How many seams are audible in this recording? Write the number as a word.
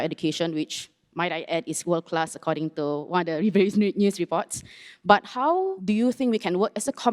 one